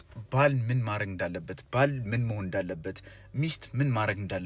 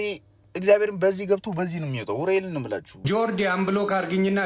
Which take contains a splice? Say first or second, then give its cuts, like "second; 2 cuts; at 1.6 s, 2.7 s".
second; 1 cut; at 2.9 s